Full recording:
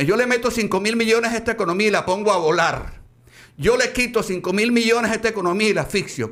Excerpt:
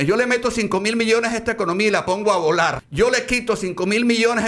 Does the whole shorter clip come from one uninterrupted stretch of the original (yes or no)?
no